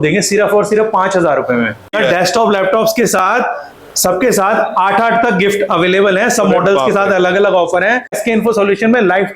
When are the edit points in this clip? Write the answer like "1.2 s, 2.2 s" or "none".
1.9 s, 8.2 s